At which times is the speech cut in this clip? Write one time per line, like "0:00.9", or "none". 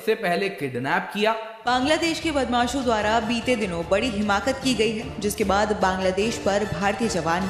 0:01.6